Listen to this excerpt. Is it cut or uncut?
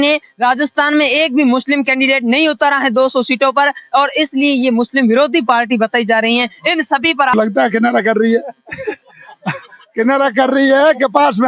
cut